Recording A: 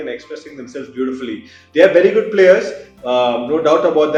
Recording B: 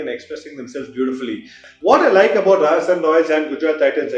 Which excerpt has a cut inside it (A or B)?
B